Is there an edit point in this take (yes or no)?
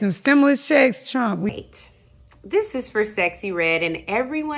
yes